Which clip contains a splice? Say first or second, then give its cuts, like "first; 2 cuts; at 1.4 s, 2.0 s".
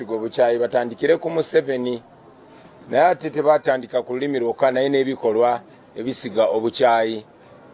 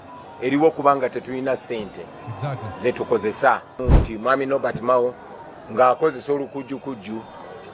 second; 1 cut; at 3.8 s